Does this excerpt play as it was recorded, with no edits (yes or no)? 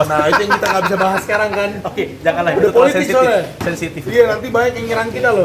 yes